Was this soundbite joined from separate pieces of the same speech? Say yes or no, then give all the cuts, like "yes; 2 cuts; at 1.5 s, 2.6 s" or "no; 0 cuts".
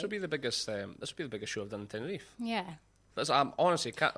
no; 0 cuts